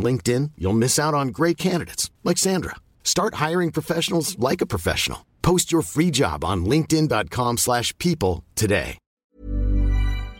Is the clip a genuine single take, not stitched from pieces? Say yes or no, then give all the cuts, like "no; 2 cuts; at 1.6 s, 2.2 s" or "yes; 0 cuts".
no; 1 cut; at 9.0 s